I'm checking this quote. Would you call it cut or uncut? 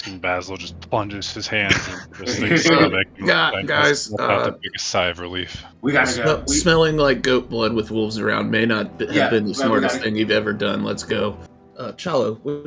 cut